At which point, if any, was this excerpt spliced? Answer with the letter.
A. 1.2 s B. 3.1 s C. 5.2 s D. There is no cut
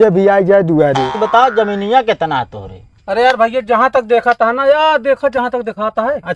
A